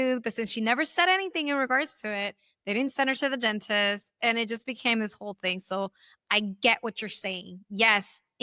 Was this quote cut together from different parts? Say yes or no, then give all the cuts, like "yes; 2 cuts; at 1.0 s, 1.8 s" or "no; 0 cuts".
no; 0 cuts